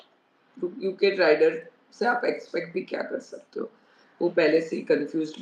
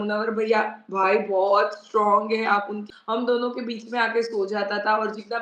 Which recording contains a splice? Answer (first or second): second